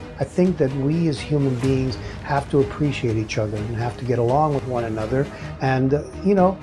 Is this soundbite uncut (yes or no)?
no